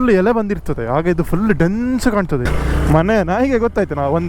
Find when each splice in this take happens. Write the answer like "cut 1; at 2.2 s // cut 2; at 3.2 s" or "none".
cut 1; at 2.5 s